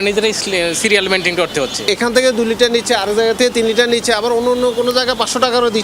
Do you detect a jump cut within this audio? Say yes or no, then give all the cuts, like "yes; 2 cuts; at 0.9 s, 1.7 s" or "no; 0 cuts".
no; 0 cuts